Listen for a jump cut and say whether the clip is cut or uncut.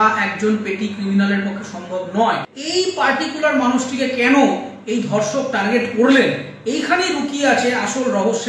cut